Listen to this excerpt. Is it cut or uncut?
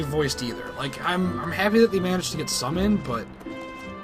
uncut